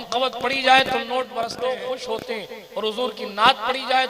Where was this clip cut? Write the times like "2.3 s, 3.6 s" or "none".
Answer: 1.5 s